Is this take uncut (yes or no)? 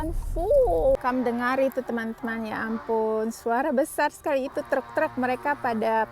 no